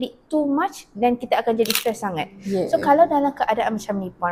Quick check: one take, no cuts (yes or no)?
yes